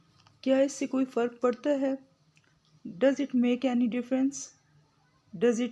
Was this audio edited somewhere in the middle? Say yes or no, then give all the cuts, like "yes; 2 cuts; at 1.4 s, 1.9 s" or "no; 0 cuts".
no; 0 cuts